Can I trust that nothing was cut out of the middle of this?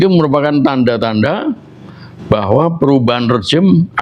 yes; 0 cuts

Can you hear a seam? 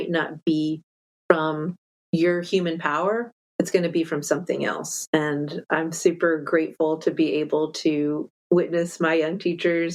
no; 0 cuts

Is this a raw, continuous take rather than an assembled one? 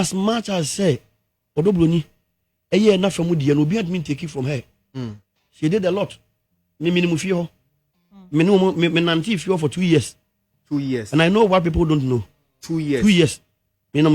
yes; 0 cuts

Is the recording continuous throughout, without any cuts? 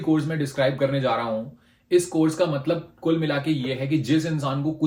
yes; 0 cuts

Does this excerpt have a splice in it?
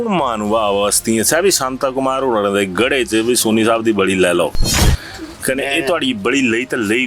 no; 0 cuts

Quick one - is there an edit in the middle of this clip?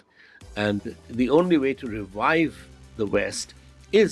yes; 1 cut; at 1.0 s

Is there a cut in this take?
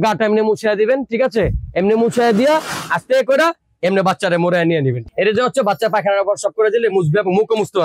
yes; 1 cut; at 5.0 s

